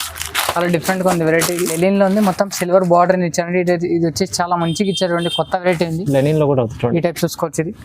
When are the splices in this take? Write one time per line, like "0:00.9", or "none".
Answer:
0:01.8